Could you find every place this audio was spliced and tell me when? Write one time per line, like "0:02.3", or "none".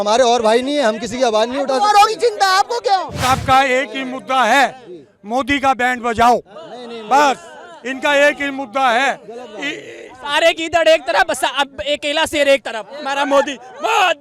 0:03.2